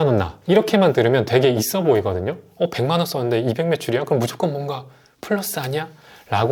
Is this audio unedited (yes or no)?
yes